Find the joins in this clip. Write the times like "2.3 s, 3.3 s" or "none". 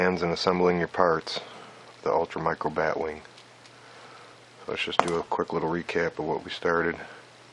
none